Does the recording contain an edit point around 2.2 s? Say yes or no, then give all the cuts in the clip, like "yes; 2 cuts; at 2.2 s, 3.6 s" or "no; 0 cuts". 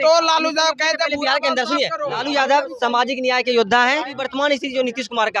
yes; 2 cuts; at 2.2 s, 4.3 s